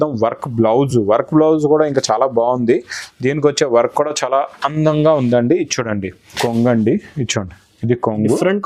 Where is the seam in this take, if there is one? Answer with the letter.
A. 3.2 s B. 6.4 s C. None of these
B